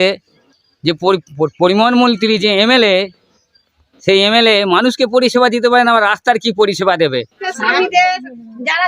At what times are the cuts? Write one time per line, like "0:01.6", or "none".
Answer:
0:07.5